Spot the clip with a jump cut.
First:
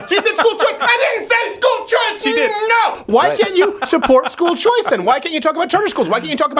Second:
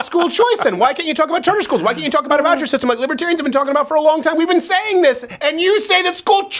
first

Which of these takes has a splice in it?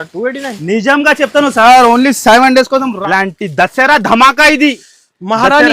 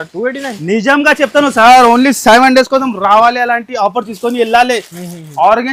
first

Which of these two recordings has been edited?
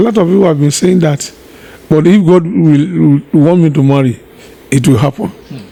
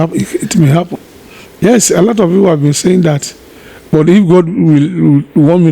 second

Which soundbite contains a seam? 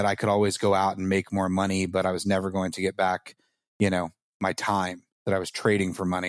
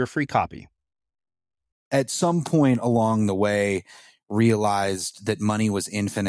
second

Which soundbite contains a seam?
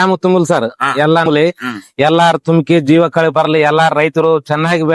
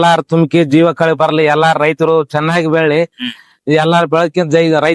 first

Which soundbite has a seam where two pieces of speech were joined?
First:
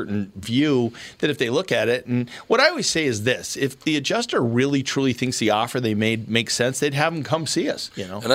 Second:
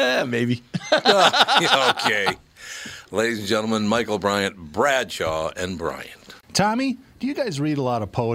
second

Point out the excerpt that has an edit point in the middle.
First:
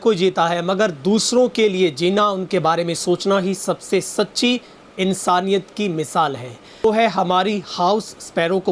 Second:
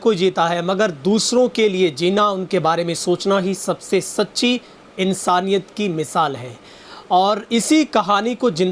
first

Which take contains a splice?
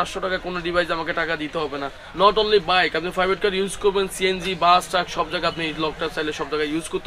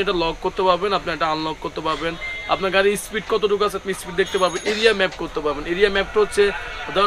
first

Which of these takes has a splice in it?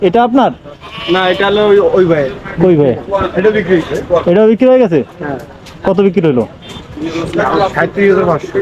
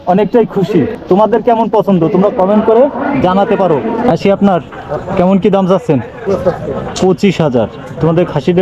second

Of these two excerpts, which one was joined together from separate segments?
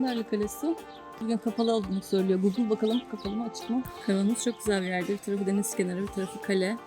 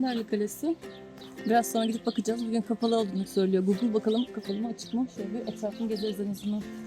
first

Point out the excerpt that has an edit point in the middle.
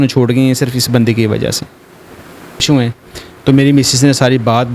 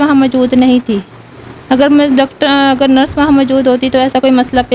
first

